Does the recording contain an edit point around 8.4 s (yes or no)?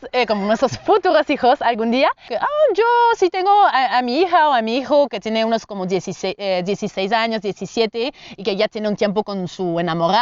no